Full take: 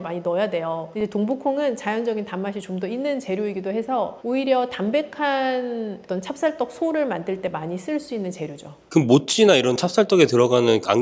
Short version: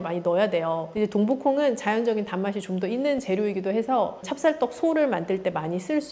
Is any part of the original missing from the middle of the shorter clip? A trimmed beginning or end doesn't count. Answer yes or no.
yes